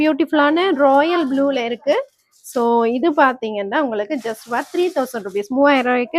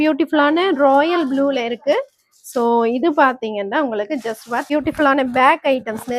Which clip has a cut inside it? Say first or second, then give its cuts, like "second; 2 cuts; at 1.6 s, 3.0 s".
second; 1 cut; at 4.7 s